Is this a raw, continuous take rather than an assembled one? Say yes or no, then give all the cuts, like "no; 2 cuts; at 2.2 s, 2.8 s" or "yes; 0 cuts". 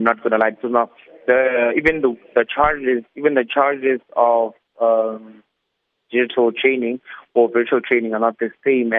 yes; 0 cuts